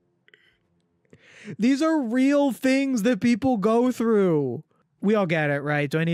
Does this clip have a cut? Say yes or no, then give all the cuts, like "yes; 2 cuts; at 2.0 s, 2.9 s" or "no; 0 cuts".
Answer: no; 0 cuts